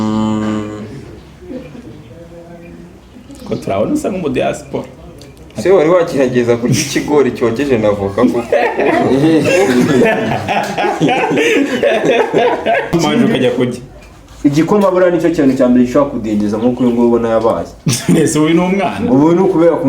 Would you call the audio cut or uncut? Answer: cut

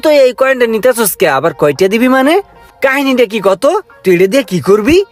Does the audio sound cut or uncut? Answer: uncut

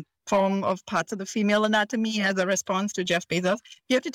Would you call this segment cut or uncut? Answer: uncut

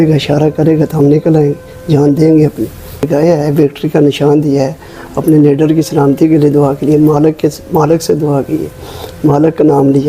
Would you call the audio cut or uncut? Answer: cut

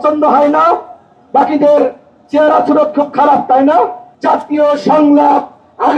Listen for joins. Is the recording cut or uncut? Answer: cut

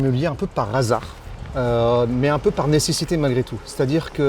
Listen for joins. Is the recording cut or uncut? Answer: uncut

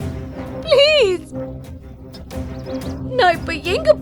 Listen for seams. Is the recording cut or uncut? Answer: uncut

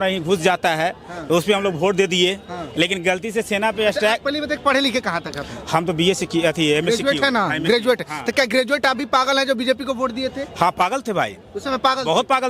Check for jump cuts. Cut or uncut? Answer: uncut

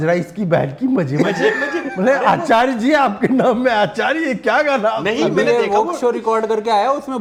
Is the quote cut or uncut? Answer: uncut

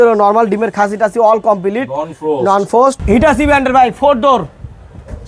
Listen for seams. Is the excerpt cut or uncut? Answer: cut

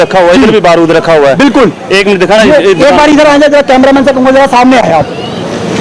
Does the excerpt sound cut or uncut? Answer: uncut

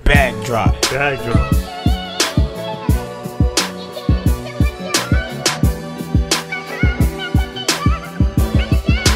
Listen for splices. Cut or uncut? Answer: uncut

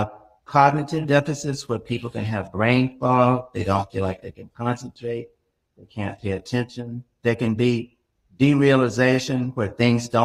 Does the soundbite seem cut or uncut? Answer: uncut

